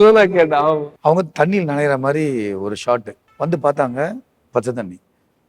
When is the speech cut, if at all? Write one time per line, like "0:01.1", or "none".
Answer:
0:00.9
0:03.2